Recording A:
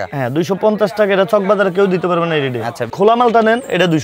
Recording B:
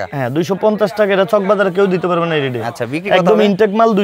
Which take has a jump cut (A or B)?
A